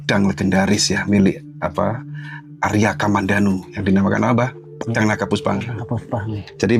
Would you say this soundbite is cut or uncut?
uncut